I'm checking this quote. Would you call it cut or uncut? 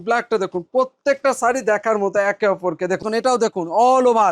cut